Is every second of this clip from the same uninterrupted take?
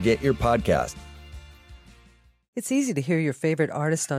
no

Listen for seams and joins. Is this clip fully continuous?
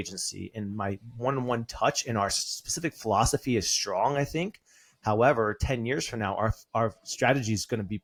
yes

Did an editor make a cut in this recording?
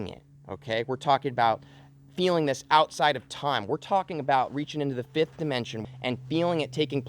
yes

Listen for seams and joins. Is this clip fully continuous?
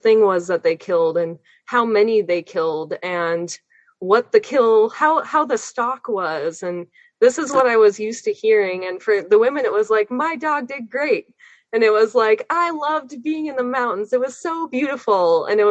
yes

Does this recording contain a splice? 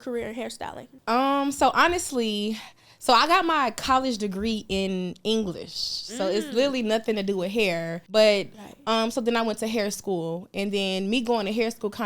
yes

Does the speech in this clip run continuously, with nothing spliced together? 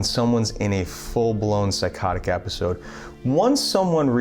yes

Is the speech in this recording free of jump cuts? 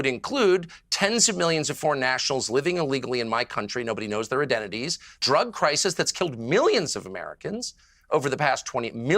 no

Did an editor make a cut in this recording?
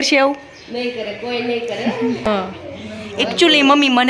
yes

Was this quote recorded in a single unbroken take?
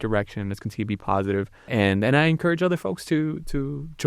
no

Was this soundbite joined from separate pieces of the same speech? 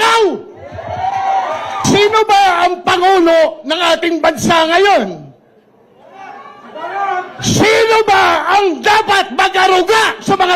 yes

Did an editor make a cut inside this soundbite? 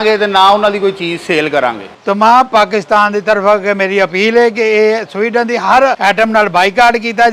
yes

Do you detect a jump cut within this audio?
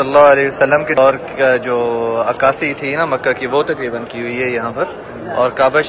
yes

